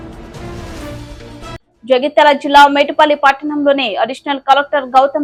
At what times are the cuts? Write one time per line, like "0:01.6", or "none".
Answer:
none